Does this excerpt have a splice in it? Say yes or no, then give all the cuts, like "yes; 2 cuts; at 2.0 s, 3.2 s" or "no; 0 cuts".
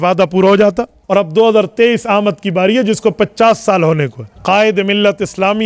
yes; 2 cuts; at 0.9 s, 4.2 s